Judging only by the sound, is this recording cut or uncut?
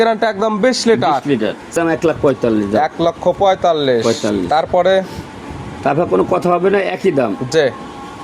cut